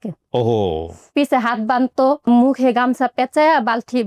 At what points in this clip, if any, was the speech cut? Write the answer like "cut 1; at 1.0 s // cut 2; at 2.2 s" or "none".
cut 1; at 1.1 s // cut 2; at 2.3 s

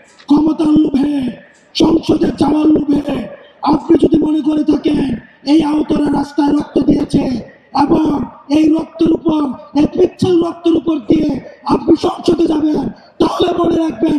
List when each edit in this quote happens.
none

